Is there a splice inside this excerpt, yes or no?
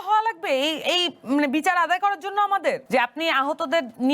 yes